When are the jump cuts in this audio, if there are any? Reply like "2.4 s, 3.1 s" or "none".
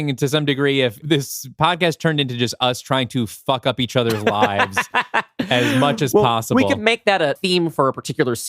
1.0 s